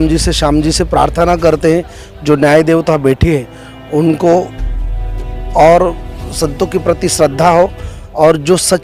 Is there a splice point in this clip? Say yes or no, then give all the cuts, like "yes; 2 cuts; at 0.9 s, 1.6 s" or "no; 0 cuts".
no; 0 cuts